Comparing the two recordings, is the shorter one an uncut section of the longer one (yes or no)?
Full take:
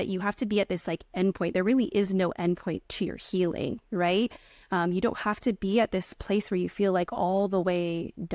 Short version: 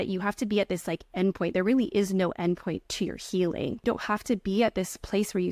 no